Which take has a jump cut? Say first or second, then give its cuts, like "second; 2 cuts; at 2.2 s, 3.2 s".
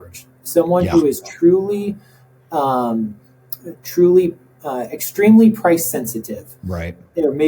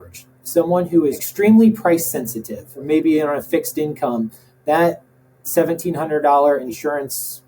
second; 3 cuts; at 1.2 s, 2.8 s, 6.6 s